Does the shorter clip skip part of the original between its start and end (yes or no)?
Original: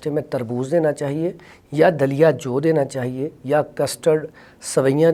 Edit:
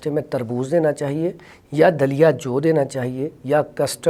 no